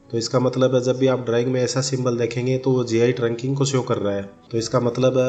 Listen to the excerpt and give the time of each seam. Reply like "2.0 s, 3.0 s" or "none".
4.3 s